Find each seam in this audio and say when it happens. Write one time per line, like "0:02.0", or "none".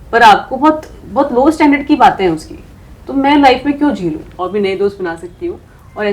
0:04.3